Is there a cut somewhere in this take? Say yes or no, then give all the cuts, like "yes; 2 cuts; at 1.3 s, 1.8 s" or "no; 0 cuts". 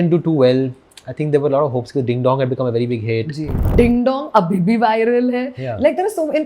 yes; 1 cut; at 3.7 s